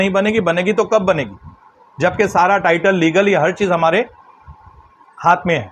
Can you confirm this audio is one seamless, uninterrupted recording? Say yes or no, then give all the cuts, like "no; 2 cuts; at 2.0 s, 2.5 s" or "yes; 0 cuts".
yes; 0 cuts